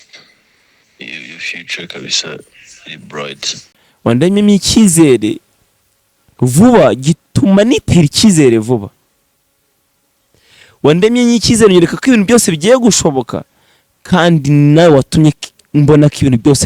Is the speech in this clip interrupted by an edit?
yes; 1 cut; at 4.0 s

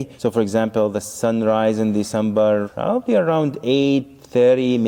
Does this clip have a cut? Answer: no; 0 cuts

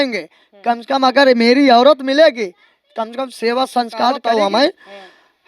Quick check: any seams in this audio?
yes; 1 cut; at 4.2 s

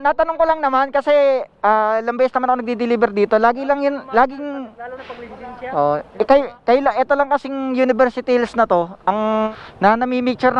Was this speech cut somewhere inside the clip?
yes; 1 cut; at 9.5 s

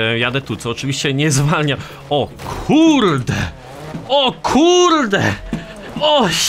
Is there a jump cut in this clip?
no; 0 cuts

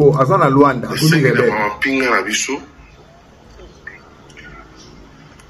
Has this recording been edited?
no; 0 cuts

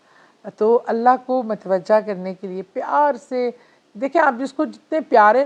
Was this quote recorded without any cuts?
yes; 0 cuts

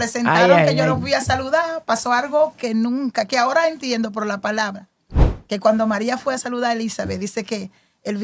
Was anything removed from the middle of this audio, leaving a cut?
no; 0 cuts

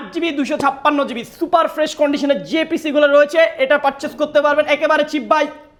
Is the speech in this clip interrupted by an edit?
no; 0 cuts

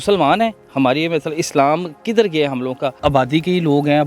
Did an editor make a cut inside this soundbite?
yes; 1 cut; at 2.9 s

